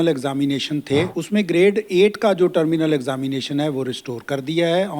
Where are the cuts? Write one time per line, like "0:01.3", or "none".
0:01.2